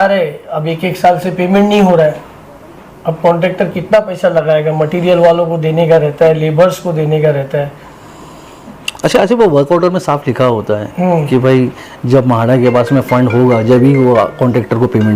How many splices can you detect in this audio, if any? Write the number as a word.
zero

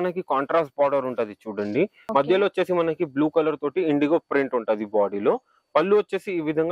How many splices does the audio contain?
one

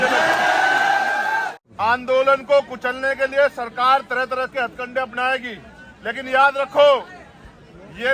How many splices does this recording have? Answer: one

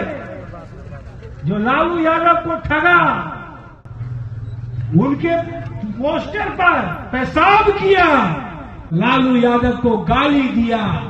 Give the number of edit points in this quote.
one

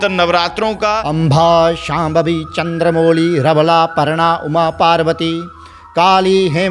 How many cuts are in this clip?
one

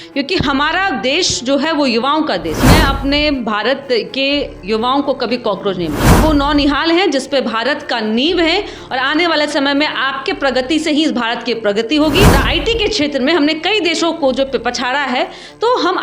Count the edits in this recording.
three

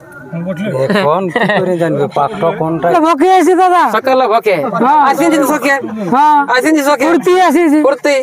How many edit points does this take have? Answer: one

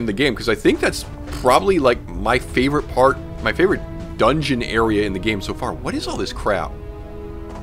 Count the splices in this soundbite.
one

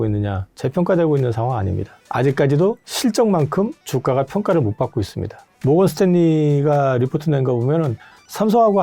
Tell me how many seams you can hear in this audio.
one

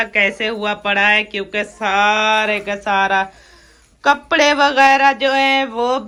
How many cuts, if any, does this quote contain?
zero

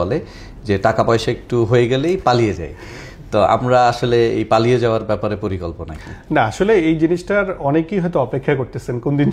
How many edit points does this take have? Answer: zero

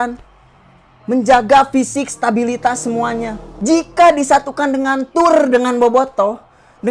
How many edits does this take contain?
one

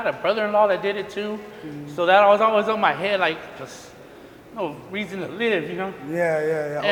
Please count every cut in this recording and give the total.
zero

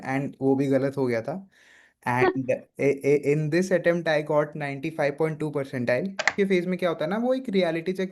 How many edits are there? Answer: one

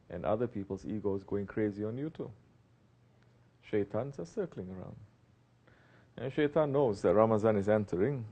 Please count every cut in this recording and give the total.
zero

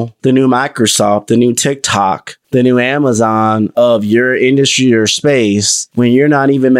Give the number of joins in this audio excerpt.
zero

